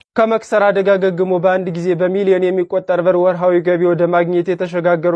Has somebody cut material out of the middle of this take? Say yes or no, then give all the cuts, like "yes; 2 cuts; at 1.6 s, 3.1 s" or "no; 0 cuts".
no; 0 cuts